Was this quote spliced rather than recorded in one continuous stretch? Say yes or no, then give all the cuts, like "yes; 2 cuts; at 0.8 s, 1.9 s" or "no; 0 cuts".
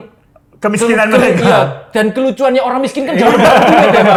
no; 0 cuts